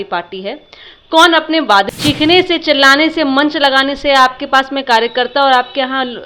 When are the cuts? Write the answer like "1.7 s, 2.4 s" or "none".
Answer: 1.9 s